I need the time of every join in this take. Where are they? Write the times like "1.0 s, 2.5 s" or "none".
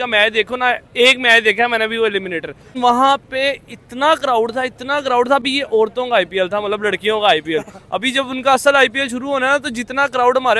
2.7 s